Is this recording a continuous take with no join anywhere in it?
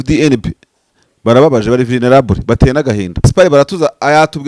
no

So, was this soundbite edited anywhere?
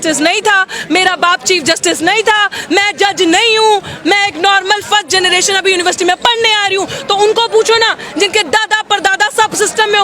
no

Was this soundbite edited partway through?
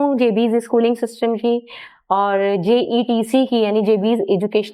no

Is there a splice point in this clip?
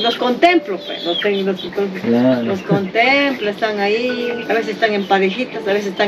yes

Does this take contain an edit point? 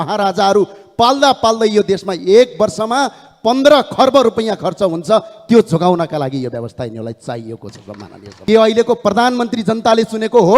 yes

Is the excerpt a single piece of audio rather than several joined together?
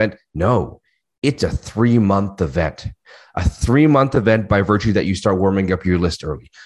yes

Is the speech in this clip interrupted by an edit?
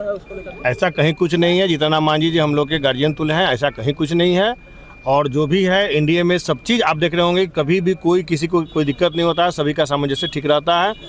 no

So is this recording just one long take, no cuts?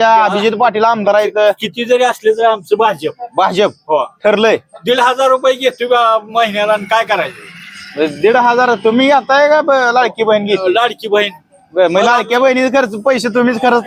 yes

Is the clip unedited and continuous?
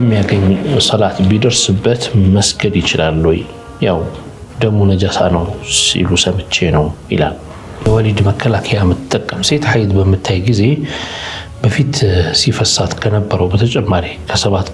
no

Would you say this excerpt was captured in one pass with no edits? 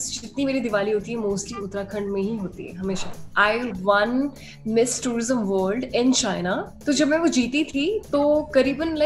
no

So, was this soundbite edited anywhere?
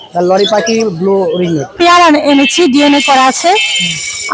yes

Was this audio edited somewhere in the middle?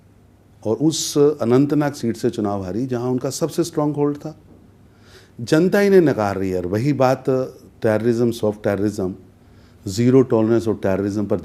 no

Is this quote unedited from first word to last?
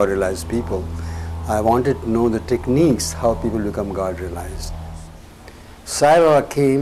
no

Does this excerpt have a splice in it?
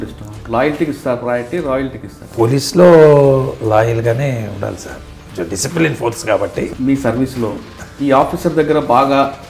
yes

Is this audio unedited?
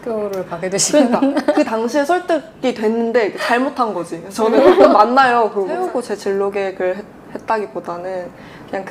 no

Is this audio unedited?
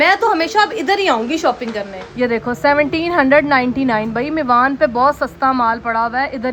yes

